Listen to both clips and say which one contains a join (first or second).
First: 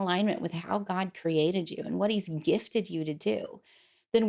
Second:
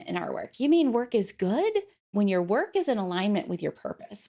second